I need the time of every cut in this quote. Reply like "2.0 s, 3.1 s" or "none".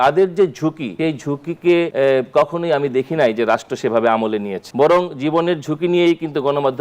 0.9 s, 1.9 s, 4.6 s